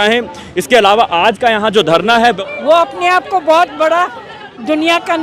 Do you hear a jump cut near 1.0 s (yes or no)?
no